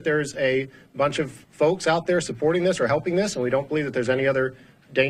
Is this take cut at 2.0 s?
no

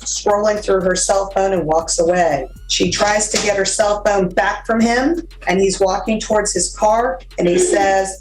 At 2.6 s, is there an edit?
yes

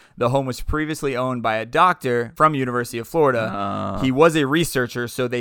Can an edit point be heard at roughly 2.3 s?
yes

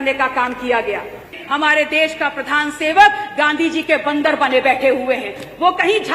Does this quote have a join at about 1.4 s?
yes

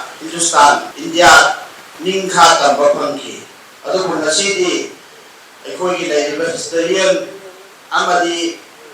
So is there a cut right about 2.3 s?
no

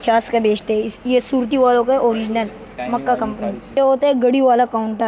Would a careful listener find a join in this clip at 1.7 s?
no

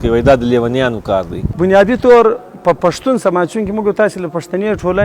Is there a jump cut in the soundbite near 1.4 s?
yes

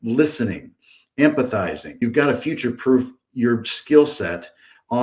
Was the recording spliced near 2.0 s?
yes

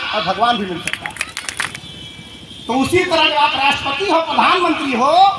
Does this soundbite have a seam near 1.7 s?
yes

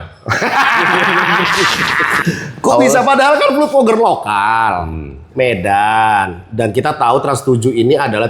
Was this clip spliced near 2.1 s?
yes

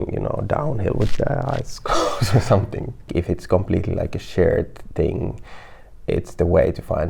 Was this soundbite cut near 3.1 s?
yes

